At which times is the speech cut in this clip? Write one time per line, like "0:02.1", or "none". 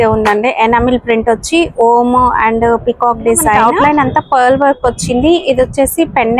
0:03.6